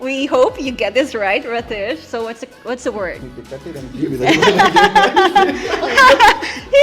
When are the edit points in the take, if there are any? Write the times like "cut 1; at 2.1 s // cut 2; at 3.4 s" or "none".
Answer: cut 1; at 3.2 s